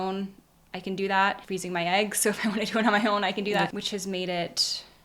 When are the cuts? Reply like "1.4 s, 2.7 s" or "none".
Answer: 1.4 s, 3.7 s